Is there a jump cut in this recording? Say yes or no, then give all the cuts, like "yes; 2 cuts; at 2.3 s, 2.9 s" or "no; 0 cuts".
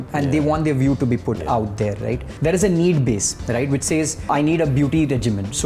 yes; 2 cuts; at 2.3 s, 4.3 s